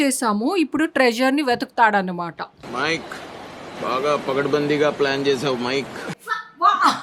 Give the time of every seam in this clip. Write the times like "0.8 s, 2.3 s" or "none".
6.0 s